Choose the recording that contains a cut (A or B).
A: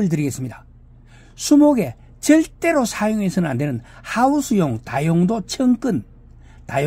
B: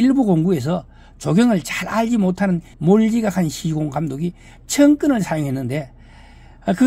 B